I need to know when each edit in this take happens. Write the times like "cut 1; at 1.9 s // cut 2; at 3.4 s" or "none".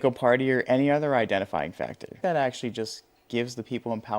cut 1; at 2.0 s